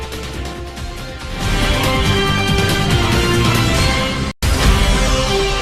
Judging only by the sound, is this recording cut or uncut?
uncut